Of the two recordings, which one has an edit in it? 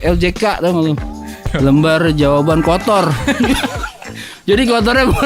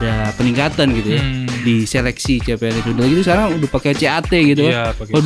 first; 1 cut; at 1.4 s

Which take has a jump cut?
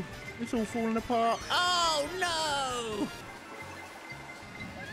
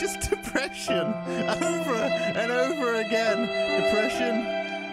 first; 1 cut; at 3.2 s

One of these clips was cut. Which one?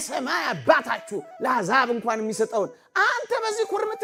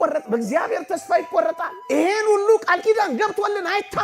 second; 1 cut; at 1.7 s

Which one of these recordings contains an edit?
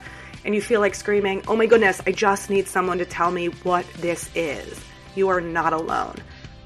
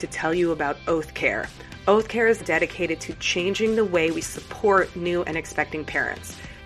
second; 1 cut; at 2.4 s

